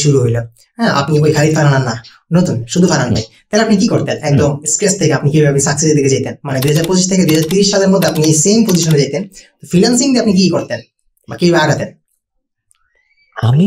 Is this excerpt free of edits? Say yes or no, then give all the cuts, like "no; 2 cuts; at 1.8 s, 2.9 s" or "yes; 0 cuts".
yes; 0 cuts